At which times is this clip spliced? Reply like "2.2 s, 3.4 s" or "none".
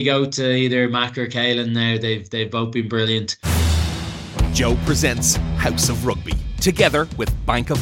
3.3 s

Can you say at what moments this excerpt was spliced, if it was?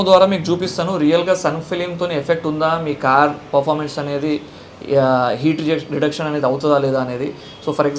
none

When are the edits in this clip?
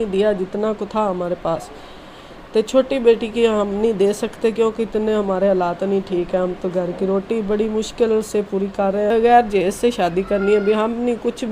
9.1 s

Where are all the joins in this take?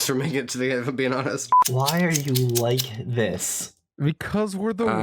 1.7 s

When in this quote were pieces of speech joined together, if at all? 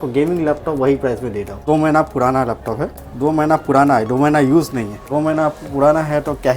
1.6 s, 3.0 s, 5.0 s

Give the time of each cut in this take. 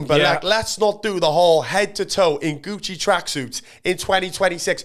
none

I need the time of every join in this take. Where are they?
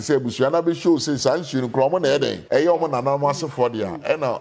2.4 s

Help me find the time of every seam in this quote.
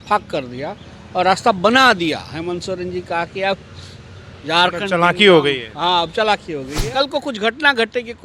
6.8 s

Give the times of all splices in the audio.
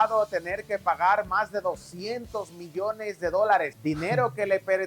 3.7 s

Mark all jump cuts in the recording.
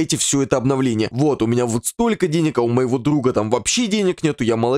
1.1 s

